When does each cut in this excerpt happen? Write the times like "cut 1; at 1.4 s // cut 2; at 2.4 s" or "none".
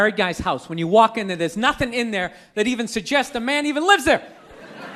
none